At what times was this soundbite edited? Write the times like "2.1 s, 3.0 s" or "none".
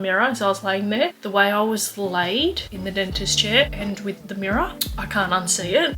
1.2 s